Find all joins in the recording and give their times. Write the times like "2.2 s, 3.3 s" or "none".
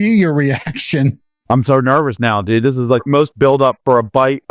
1.3 s, 3.1 s